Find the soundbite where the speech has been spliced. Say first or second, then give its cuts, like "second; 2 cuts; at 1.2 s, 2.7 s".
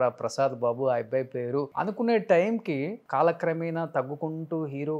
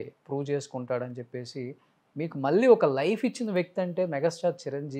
first; 2 cuts; at 1.7 s, 3.0 s